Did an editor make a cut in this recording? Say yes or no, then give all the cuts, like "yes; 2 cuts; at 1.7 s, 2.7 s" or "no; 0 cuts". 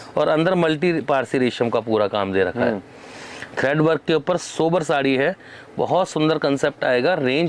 no; 0 cuts